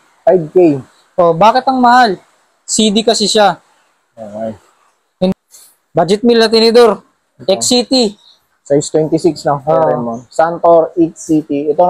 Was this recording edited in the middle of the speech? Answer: yes; 1 cut; at 5.3 s

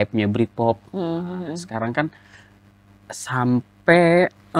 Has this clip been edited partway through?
no; 0 cuts

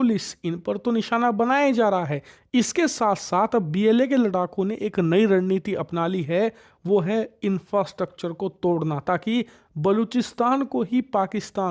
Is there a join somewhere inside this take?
no; 0 cuts

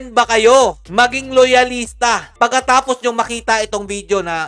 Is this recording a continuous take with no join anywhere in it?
yes; 0 cuts

